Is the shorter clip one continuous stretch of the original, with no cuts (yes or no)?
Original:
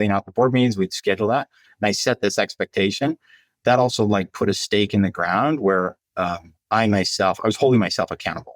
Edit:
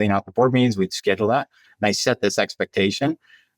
yes